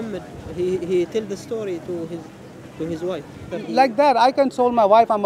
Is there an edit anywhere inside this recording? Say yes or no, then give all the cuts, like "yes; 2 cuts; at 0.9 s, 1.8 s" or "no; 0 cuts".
yes; 1 cut; at 3.4 s